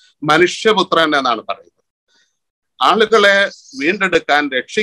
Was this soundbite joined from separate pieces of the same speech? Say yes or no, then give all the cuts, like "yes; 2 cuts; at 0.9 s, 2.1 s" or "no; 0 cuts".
no; 0 cuts